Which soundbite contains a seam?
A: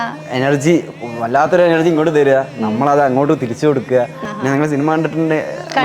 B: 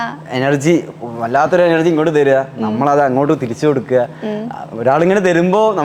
A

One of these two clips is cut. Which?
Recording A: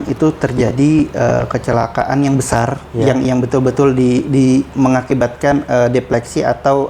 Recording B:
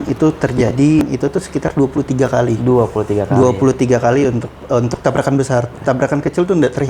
B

